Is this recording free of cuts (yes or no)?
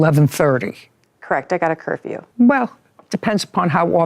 yes